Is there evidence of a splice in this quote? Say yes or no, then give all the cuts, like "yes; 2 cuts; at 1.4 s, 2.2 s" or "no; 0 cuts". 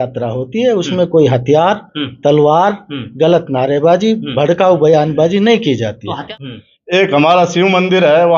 yes; 1 cut; at 6.3 s